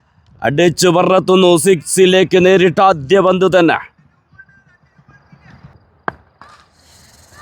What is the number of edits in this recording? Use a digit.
1